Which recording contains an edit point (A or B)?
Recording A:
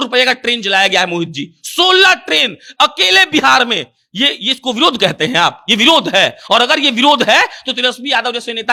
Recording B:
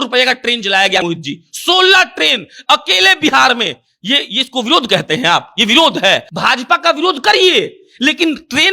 B